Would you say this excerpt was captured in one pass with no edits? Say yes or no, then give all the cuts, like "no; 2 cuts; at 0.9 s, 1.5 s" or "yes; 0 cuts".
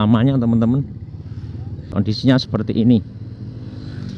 no; 1 cut; at 1.9 s